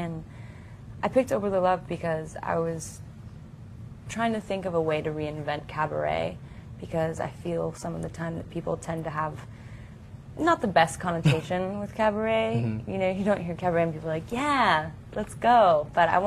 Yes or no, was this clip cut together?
yes